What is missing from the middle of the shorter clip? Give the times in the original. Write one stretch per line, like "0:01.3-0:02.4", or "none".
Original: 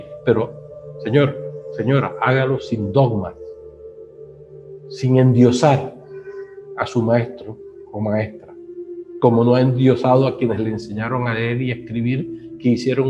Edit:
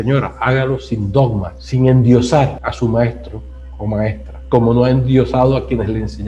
0:03.4-0:04.9
0:05.9-0:06.8
0:08.4-0:09.0